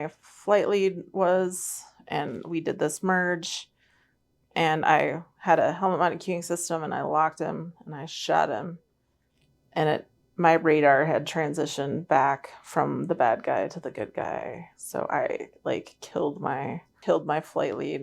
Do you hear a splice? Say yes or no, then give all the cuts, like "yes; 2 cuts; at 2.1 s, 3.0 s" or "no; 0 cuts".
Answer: yes; 1 cut; at 16.9 s